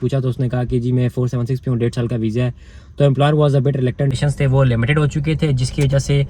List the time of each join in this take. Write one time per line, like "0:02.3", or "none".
0:04.1